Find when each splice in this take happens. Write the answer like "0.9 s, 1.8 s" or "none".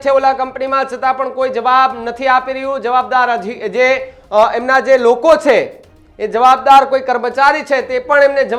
none